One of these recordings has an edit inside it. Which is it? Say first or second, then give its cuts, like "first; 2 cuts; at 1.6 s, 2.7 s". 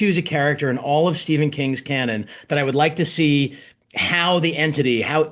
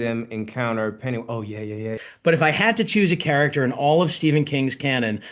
second; 1 cut; at 2.0 s